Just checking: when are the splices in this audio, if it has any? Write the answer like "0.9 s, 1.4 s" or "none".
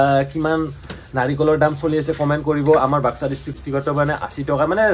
3.5 s